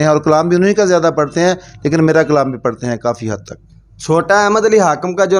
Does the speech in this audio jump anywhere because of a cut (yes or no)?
no